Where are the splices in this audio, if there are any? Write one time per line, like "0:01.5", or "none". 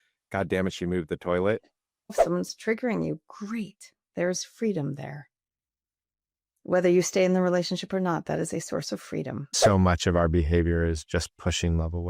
0:02.2
0:09.5